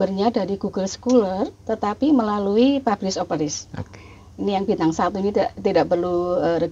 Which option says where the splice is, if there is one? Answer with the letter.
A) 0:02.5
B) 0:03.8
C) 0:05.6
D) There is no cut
D